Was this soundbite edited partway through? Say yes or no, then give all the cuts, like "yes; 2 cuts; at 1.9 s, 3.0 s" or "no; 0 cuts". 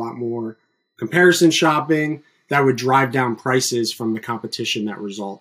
no; 0 cuts